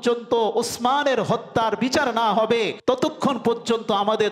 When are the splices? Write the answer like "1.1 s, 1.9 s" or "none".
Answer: 2.7 s